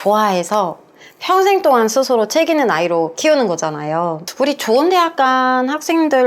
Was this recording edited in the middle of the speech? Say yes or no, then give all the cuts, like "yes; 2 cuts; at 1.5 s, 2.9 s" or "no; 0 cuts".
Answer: yes; 1 cut; at 4.3 s